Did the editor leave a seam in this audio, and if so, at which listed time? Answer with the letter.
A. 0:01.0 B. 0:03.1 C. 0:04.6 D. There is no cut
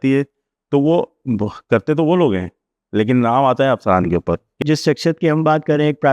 C